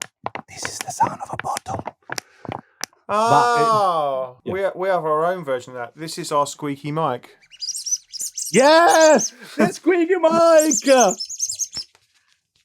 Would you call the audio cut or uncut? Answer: cut